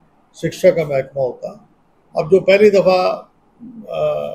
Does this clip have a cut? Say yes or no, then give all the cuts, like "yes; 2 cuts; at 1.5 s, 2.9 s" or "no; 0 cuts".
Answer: no; 0 cuts